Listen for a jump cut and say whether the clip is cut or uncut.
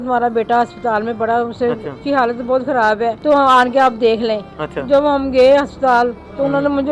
cut